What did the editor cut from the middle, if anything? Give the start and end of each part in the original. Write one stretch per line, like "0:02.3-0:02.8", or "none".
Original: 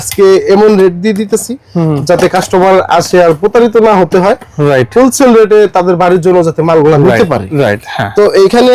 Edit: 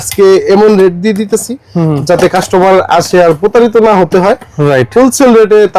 none